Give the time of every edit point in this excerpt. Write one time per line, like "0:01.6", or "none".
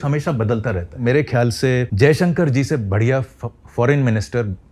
0:01.0
0:01.9